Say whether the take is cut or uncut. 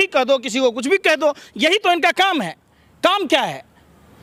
uncut